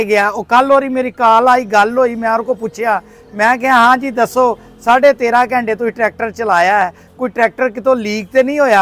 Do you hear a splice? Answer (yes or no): no